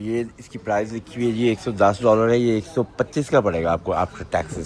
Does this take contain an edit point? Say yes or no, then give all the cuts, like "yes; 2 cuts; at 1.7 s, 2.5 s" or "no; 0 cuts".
no; 0 cuts